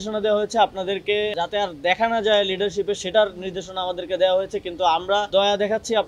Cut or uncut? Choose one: cut